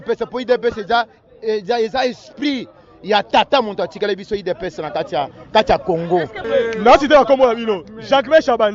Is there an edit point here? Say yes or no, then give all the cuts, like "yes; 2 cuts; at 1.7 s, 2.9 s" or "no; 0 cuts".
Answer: yes; 1 cut; at 6.4 s